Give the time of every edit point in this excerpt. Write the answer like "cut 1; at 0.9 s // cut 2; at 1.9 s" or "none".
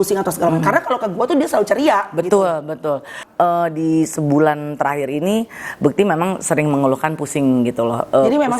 cut 1; at 3.2 s